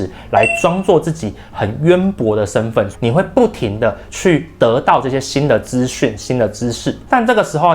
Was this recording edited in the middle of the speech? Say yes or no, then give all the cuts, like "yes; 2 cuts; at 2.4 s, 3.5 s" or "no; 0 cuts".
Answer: no; 0 cuts